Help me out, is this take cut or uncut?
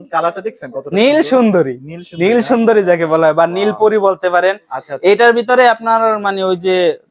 uncut